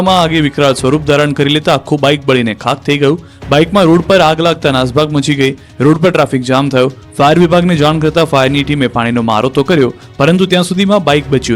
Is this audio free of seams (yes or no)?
no